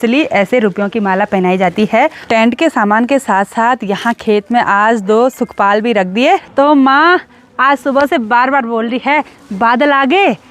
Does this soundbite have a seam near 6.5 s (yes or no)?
yes